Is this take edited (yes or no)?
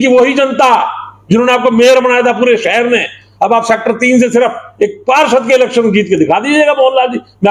no